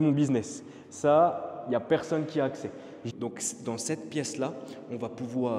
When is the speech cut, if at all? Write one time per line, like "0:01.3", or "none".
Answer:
0:03.0